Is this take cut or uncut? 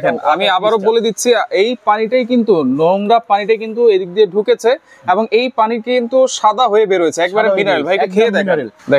uncut